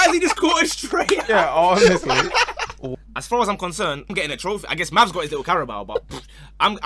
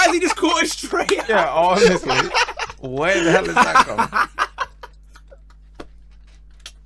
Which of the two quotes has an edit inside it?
first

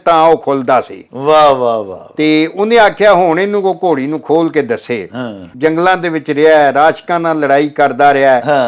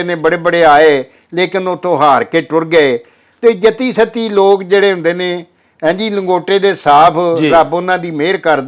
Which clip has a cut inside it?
first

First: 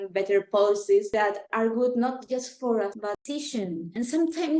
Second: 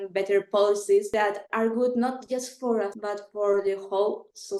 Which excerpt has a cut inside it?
first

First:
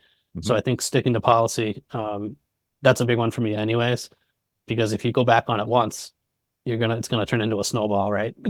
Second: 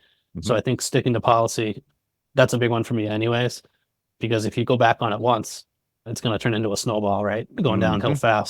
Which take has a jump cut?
second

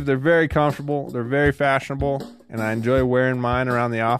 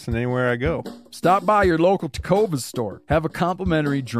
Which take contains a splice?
second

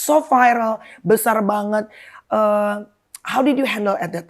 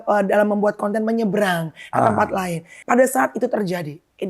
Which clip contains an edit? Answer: second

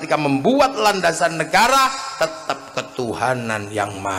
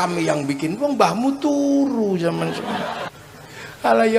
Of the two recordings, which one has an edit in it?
second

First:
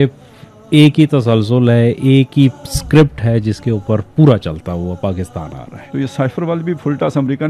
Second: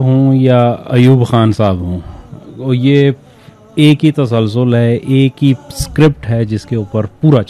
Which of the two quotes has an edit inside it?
first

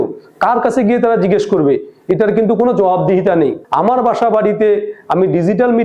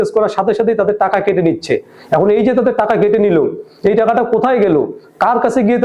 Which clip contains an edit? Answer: first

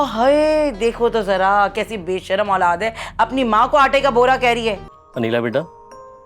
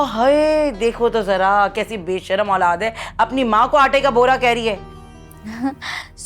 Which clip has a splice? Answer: first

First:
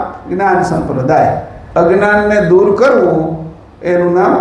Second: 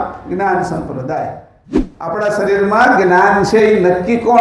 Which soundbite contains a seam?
second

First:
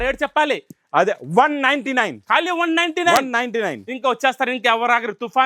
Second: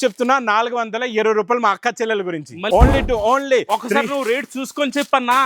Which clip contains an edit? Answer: second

